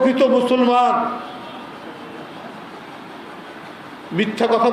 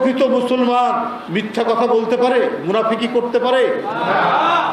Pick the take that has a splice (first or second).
second